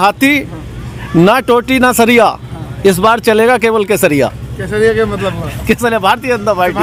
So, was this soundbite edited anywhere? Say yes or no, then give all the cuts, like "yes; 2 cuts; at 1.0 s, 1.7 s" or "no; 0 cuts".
no; 0 cuts